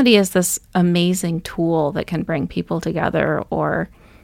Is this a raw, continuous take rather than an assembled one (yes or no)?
yes